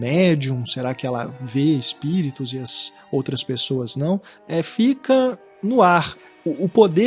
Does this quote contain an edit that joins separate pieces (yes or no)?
yes